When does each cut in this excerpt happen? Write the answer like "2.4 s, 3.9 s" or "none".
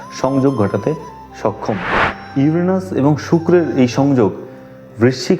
2.1 s